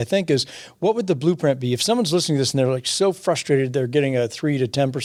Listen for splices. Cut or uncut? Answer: uncut